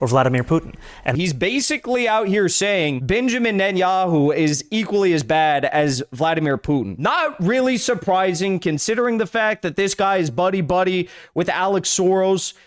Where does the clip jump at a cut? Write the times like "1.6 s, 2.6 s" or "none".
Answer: 1.0 s, 6.9 s